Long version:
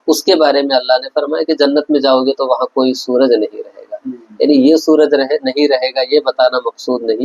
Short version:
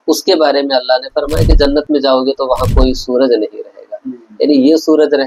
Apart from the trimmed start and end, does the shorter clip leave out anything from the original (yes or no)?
no